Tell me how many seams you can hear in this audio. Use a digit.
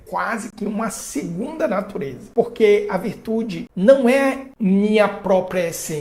3